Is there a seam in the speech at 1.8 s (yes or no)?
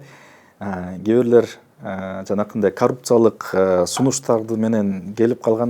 no